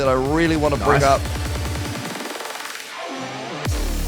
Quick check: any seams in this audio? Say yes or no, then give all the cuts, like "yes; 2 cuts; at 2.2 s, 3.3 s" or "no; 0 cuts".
no; 0 cuts